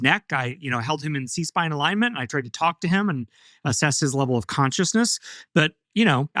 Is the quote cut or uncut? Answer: uncut